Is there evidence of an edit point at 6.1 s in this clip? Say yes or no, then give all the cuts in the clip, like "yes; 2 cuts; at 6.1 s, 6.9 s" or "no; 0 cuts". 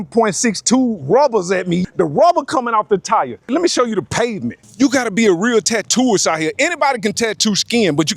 no; 3 cuts; at 1.8 s, 3.5 s, 4.6 s